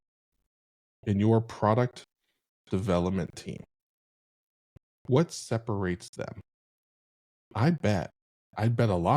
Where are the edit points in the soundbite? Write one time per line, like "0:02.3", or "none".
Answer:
none

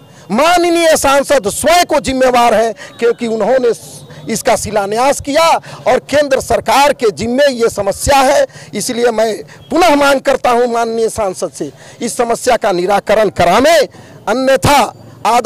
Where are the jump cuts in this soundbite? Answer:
none

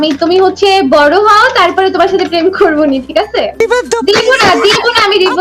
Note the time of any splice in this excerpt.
0:03.5

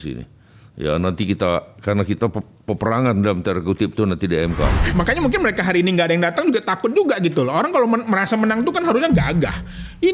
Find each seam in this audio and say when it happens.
0:04.8

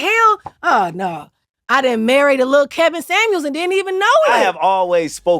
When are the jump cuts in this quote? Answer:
0:01.5
0:04.3

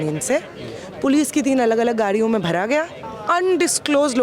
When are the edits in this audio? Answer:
0:03.1

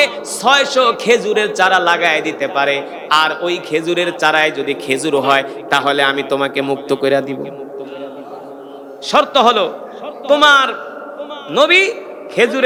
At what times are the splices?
none

